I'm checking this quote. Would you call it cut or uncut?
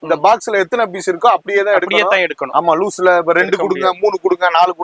uncut